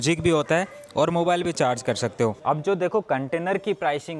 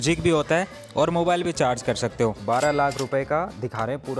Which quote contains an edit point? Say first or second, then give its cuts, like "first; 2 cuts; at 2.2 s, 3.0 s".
second; 1 cut; at 2.4 s